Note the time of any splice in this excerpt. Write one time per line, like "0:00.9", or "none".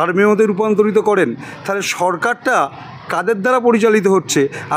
none